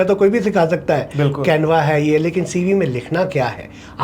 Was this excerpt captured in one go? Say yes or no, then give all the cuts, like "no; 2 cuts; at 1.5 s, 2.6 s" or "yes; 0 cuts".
yes; 0 cuts